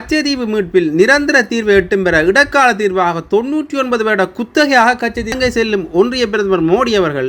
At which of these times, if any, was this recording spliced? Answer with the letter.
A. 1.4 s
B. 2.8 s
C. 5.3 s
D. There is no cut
C